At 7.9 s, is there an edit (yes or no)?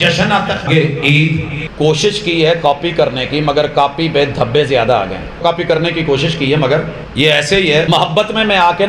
yes